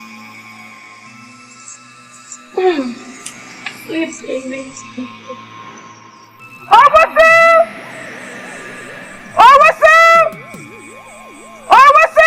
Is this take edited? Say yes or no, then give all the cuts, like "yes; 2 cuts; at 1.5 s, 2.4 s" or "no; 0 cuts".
yes; 5 cuts; at 2.0 s, 5.1 s, 6.7 s, 7.7 s, 9.3 s